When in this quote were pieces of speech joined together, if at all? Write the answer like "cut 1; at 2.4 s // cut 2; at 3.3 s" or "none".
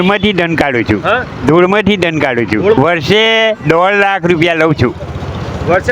cut 1; at 2.8 s